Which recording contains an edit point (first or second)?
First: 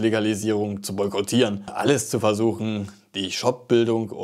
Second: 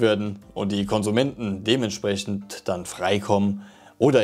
first